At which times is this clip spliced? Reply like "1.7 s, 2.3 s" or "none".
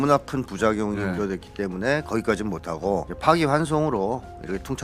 none